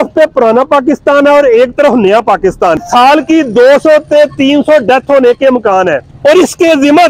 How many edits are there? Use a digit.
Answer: 2